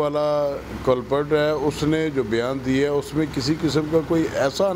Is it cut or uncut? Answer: uncut